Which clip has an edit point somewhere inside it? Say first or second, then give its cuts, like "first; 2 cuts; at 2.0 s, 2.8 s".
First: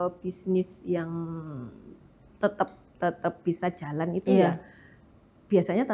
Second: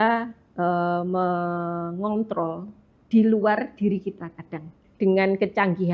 second; 1 cut; at 4.8 s